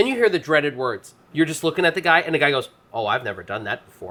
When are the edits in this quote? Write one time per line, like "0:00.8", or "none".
none